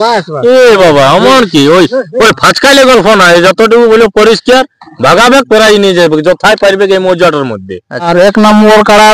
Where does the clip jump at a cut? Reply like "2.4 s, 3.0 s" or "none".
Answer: 8.1 s